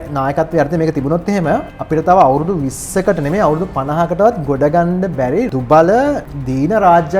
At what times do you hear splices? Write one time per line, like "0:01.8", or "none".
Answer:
0:01.7
0:05.5
0:06.3